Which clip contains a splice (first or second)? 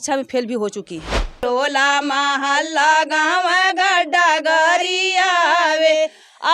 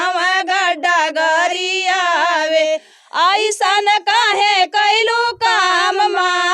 first